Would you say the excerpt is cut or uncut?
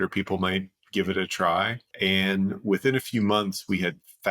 cut